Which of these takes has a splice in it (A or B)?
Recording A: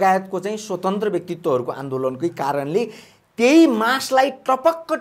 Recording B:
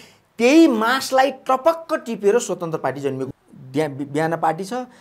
B